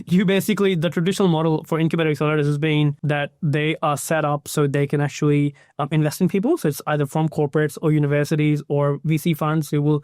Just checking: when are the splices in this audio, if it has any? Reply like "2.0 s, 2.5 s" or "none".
3.0 s